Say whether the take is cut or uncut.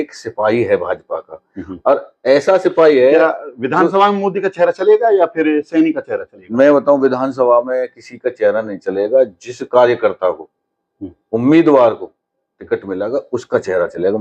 uncut